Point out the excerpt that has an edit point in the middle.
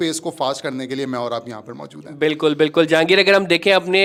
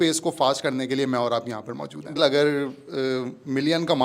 second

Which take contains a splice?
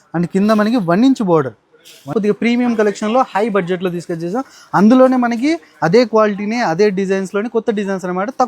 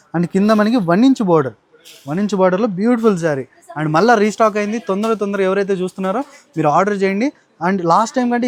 first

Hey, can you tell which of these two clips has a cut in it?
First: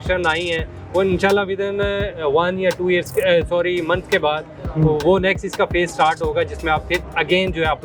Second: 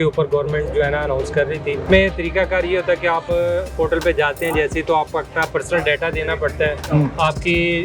second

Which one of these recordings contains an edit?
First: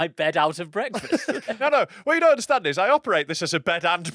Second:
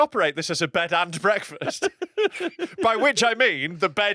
first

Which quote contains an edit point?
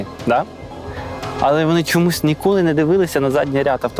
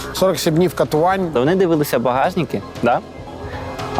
second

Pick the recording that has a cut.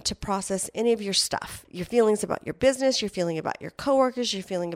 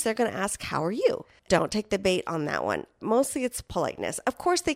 second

